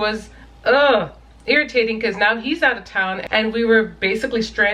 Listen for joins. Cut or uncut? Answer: cut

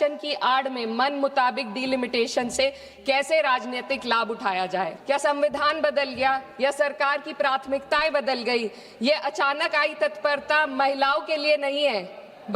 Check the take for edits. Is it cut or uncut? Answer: cut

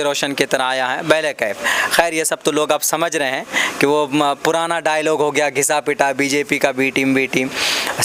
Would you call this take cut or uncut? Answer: uncut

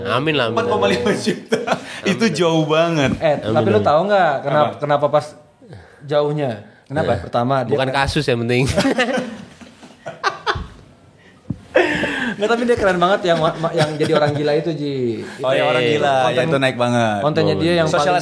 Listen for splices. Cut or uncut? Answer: uncut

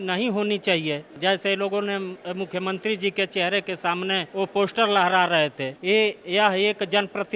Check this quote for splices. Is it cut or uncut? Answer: cut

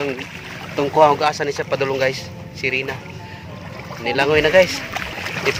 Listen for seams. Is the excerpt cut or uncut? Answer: uncut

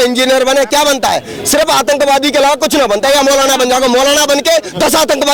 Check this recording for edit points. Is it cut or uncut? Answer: uncut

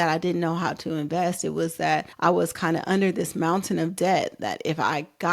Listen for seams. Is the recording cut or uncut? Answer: cut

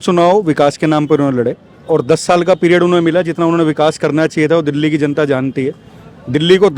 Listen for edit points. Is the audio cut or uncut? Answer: uncut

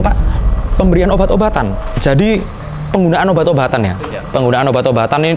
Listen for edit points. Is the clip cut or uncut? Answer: cut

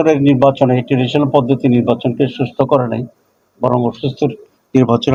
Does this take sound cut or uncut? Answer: uncut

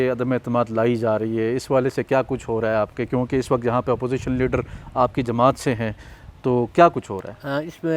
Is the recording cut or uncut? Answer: uncut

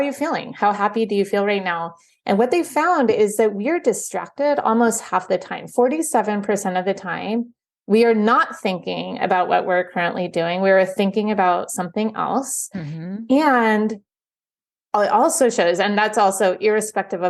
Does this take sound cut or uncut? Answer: uncut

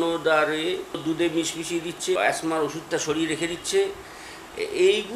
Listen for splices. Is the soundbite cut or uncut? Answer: cut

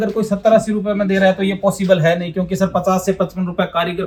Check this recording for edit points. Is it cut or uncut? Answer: uncut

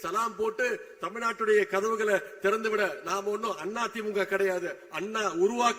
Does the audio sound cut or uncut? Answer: uncut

